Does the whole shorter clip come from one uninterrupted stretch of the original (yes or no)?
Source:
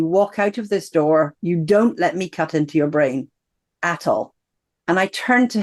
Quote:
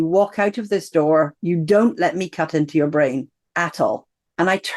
no